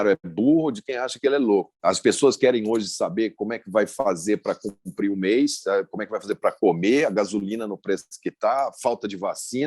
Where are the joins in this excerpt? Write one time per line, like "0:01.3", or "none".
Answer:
0:01.9

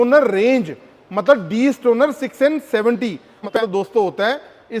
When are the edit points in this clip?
0:03.5

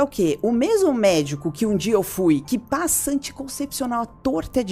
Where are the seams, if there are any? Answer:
none

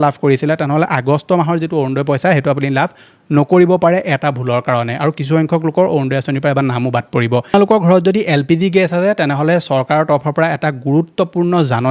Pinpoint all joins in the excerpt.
0:07.5

